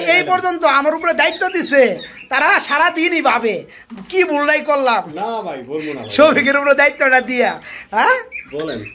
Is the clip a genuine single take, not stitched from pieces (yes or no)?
yes